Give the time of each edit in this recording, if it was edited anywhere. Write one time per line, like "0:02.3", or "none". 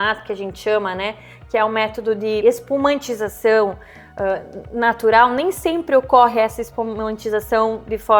none